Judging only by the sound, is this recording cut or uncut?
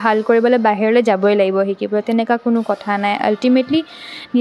uncut